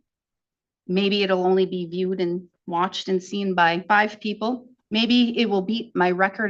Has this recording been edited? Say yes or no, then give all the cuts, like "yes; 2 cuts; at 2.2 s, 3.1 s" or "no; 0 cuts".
yes; 2 cuts; at 3.8 s, 4.7 s